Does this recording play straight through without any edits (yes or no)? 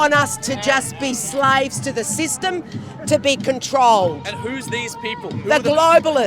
yes